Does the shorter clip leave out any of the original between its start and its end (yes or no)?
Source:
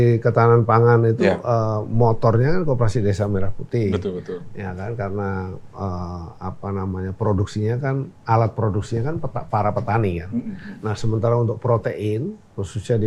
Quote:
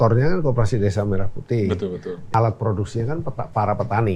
yes